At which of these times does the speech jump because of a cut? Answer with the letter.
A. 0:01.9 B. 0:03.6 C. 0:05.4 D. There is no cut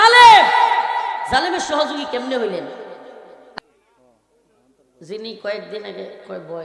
B